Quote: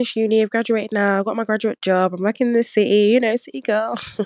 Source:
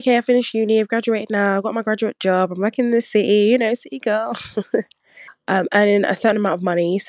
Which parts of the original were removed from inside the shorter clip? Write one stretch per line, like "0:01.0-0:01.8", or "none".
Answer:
none